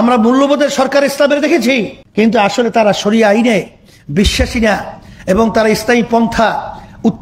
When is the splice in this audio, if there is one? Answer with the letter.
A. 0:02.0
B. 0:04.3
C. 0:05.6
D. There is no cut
A